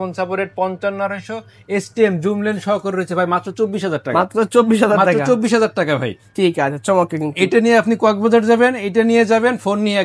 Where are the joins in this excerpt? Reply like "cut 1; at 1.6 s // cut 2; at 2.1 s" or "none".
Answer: none